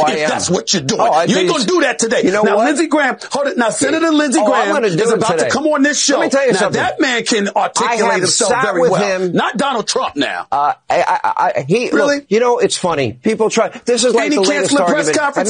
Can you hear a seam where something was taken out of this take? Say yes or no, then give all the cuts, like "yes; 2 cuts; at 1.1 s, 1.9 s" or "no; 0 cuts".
yes; 1 cut; at 10.4 s